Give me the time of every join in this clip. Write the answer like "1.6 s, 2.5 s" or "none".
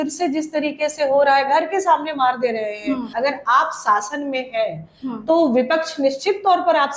3.1 s